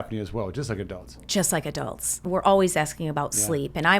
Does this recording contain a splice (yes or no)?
yes